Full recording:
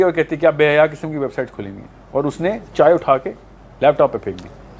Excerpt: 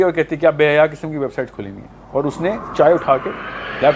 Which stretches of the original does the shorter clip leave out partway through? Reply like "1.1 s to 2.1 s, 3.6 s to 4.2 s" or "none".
none